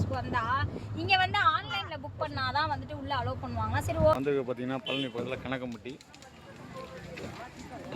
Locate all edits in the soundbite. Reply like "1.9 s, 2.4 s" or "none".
4.2 s